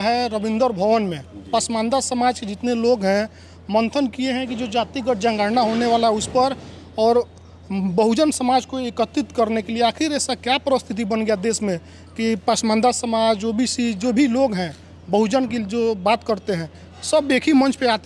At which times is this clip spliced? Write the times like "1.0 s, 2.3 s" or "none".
none